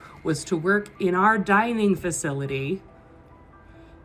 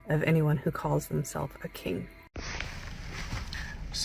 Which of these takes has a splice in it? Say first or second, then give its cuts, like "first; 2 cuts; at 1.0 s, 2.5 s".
second; 1 cut; at 2.3 s